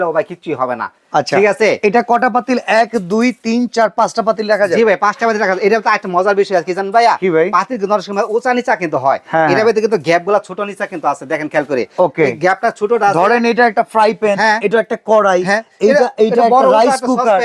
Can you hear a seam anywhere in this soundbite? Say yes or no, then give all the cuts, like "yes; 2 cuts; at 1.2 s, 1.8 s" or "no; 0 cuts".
no; 0 cuts